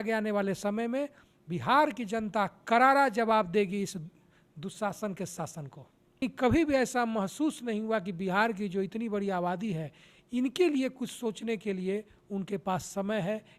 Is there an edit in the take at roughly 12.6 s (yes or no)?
no